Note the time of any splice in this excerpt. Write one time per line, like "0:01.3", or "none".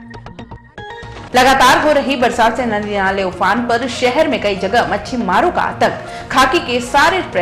none